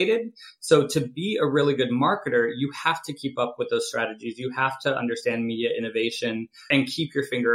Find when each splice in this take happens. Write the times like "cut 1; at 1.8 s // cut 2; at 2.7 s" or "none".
cut 1; at 6.6 s